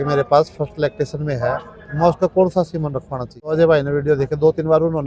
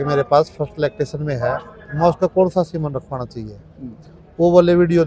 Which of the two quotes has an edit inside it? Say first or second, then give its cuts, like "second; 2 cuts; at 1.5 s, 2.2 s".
first; 1 cut; at 3.5 s